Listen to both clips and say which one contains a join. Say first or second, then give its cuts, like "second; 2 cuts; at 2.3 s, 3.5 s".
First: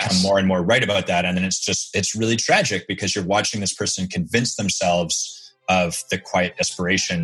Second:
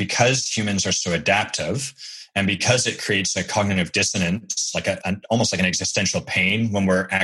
second; 1 cut; at 5.0 s